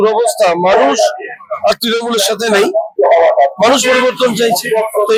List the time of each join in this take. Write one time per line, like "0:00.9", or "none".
none